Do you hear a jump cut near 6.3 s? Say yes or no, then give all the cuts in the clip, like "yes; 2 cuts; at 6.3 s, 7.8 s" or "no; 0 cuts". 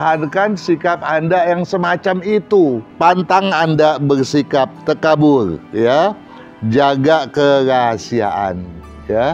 no; 1 cut; at 2.9 s